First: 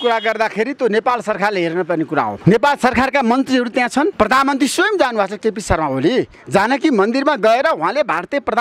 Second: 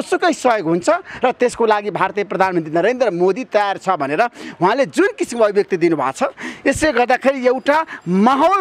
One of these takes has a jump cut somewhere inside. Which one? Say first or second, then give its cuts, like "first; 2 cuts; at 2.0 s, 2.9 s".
first; 2 cuts; at 2.4 s, 4.1 s